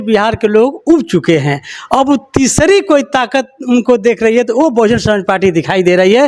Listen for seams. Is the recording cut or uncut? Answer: uncut